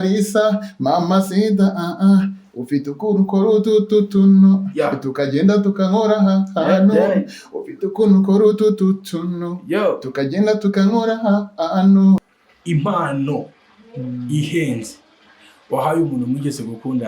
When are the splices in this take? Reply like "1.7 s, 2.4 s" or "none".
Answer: 12.3 s